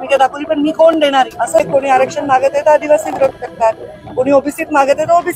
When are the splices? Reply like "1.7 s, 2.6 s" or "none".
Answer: 1.4 s